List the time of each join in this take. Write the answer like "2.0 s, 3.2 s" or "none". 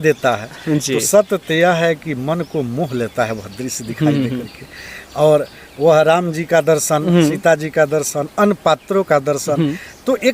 none